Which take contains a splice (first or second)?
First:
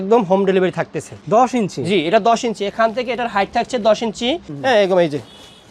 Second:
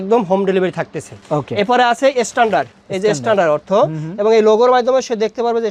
first